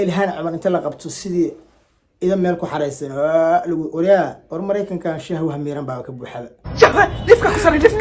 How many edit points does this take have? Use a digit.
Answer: 1